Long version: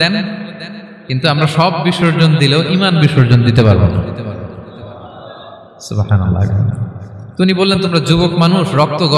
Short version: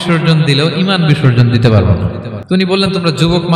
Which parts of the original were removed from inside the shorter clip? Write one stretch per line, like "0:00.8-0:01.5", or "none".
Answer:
0:04.2-0:07.2